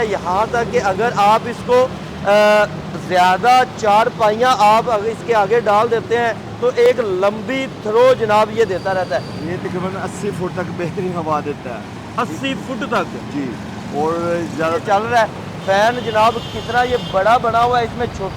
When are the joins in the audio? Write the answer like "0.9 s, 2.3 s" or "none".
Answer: 9.4 s, 14.8 s